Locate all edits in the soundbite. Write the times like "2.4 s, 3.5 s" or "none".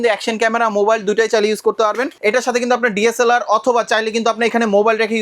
2.1 s